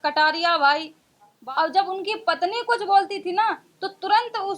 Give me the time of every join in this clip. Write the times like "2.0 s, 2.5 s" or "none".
1.4 s

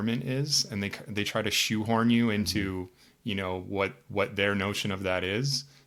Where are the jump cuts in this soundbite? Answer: none

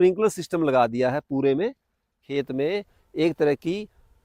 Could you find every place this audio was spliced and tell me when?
2.2 s

